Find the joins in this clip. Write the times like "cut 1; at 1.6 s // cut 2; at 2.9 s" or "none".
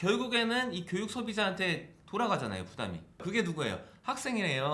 cut 1; at 3.2 s